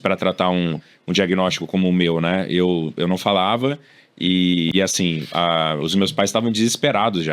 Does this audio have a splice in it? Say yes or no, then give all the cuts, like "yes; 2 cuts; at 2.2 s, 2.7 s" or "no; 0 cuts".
yes; 1 cut; at 4.7 s